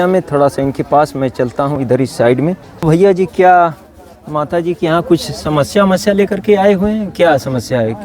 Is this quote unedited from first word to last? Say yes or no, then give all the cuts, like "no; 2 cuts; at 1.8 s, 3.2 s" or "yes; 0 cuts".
no; 1 cut; at 2.8 s